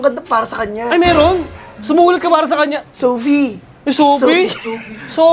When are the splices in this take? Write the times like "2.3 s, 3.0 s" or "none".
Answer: none